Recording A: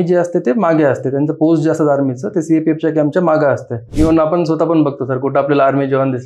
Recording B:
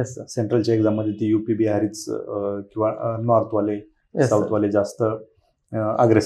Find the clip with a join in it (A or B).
A